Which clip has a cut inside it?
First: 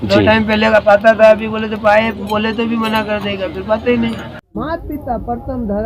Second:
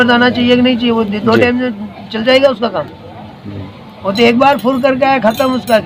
first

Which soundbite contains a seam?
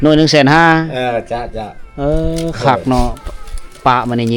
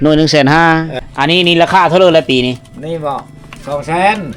second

